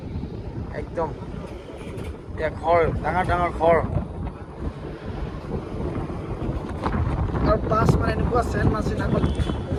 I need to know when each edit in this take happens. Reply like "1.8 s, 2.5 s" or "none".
none